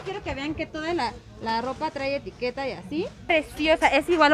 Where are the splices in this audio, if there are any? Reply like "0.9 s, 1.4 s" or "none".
3.3 s

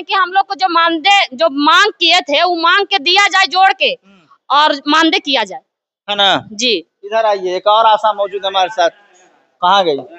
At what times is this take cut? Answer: none

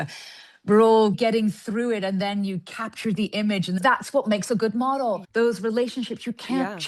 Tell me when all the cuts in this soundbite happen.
1.2 s, 3.8 s, 5.2 s

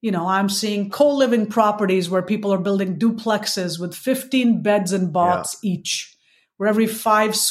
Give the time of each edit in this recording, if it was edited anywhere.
0.9 s

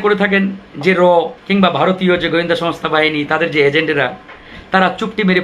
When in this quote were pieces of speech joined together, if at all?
1.4 s

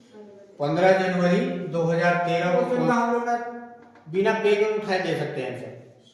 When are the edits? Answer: 2.7 s

